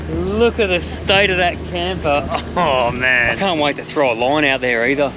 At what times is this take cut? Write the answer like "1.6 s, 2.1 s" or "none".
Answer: 3.3 s